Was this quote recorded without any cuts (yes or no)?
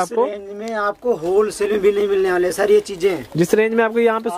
yes